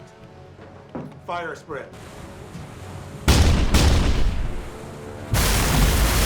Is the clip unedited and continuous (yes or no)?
no